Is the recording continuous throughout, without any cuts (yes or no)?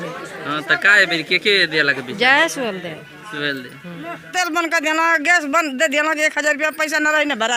no